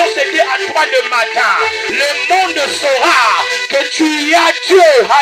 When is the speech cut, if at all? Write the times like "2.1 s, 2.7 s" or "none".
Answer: 1.9 s

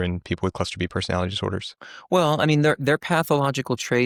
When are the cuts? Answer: none

